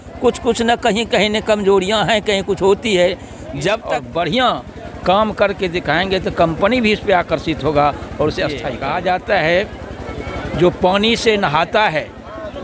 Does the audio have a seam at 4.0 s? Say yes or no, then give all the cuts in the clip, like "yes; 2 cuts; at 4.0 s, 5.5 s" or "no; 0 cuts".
yes; 2 cuts; at 4.0 s, 8.7 s